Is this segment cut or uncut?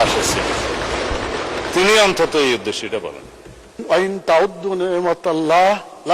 cut